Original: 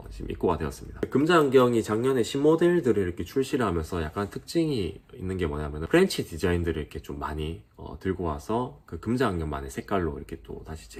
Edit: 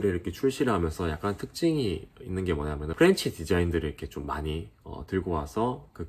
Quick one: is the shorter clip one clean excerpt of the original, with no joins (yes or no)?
yes